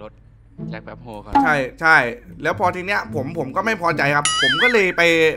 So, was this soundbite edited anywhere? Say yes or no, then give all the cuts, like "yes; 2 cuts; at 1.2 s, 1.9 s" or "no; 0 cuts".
no; 0 cuts